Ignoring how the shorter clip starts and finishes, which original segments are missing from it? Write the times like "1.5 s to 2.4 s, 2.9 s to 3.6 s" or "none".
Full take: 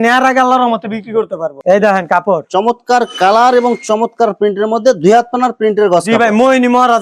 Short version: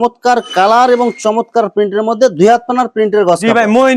none